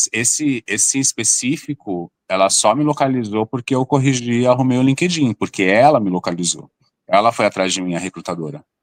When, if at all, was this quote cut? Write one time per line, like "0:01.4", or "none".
none